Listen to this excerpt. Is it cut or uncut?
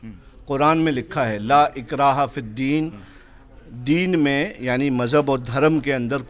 uncut